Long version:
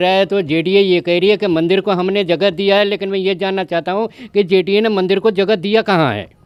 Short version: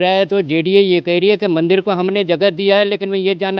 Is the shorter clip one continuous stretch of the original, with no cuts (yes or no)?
yes